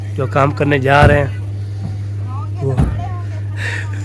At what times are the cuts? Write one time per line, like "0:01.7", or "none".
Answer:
none